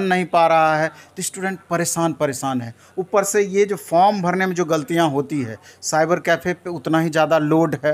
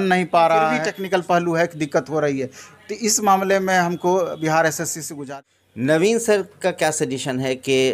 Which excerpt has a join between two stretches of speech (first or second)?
second